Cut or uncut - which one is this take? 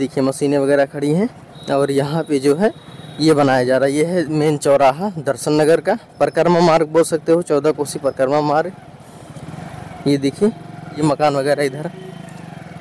cut